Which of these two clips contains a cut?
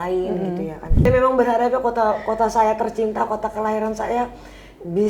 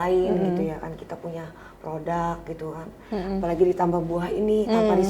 first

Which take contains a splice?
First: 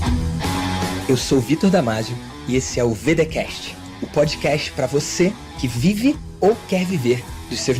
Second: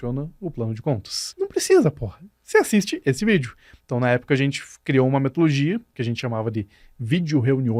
second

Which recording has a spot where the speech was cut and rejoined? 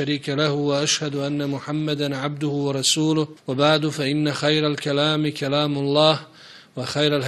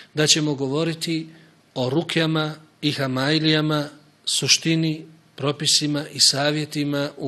first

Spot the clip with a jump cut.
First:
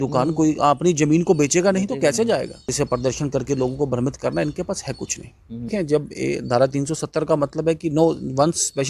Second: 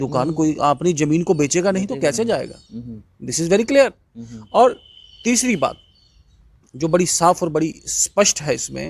first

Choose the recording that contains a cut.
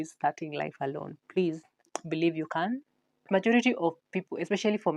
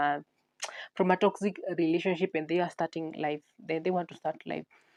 first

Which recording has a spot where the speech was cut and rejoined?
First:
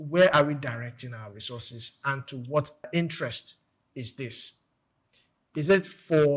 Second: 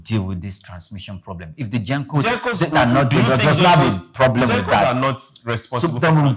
first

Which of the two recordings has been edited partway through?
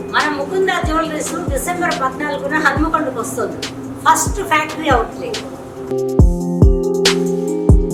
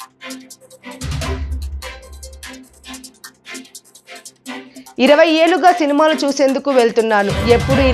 second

